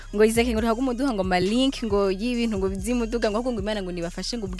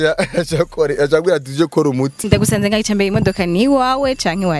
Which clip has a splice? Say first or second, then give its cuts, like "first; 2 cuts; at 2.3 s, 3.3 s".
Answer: second; 1 cut; at 2.2 s